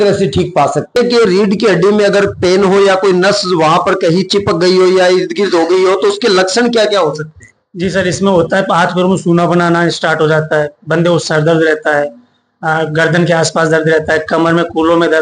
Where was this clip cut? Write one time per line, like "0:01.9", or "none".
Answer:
0:01.0